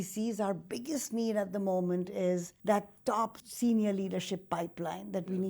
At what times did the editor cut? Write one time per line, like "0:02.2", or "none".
0:02.5
0:03.4